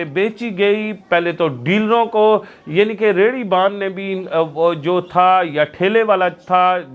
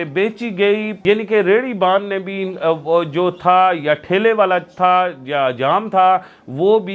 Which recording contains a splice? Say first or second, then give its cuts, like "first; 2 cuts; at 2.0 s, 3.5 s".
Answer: second; 1 cut; at 0.9 s